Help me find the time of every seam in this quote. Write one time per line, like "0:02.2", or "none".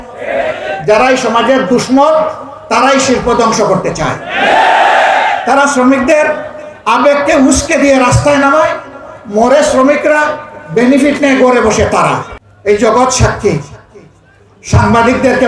0:12.3